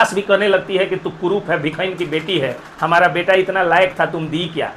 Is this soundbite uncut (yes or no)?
yes